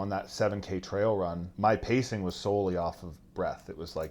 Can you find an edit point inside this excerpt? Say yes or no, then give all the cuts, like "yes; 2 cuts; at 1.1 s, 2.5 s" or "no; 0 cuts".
yes; 1 cut; at 1.5 s